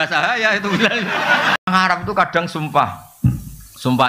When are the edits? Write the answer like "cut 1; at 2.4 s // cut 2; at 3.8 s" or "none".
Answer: cut 1; at 1.7 s